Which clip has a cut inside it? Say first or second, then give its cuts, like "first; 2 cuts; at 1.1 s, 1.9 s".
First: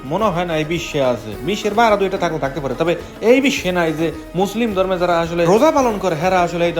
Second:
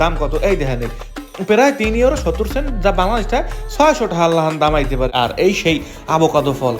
second; 1 cut; at 5.1 s